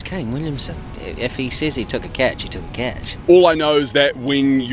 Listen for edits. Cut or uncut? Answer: cut